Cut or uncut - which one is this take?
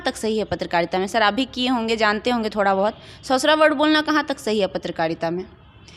uncut